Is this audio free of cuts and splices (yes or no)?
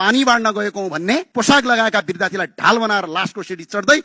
no